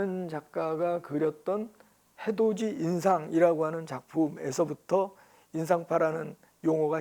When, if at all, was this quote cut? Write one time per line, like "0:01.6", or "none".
none

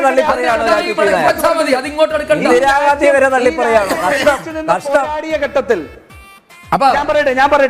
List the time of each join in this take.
none

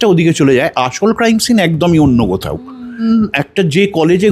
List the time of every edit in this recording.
0:03.0

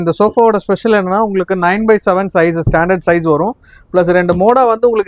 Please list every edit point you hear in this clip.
none

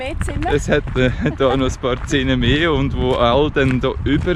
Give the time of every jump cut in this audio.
none

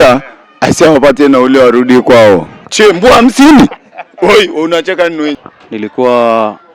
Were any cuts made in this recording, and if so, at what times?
none

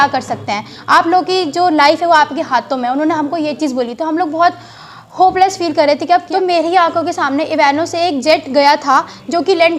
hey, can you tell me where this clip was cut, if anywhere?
0:06.3

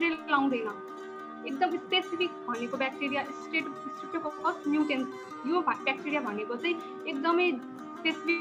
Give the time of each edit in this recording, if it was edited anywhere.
none

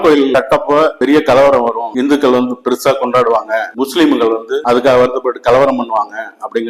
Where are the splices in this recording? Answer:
none

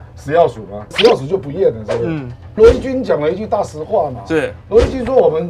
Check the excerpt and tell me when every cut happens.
0:00.9
0:02.6

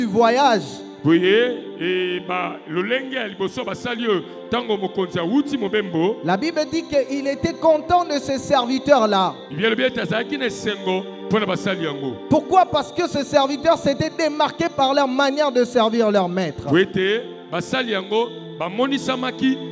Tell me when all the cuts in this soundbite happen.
none

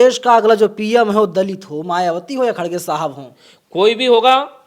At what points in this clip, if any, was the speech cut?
none

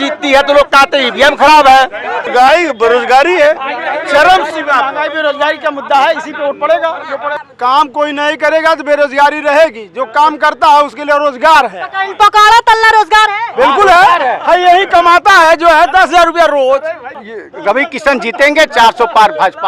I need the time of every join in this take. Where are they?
0:02.3
0:07.4
0:17.2

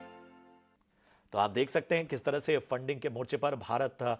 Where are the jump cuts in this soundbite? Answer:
0:02.4

